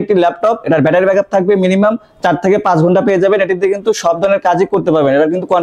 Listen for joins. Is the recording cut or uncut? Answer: uncut